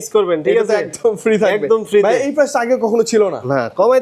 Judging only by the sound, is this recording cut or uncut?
uncut